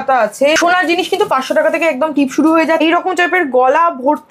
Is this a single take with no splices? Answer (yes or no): no